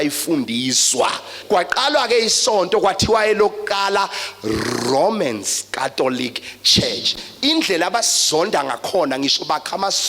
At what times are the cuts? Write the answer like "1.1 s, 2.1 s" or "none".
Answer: 1.3 s